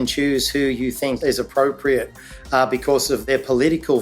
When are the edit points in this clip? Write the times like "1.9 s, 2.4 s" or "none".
1.2 s, 3.2 s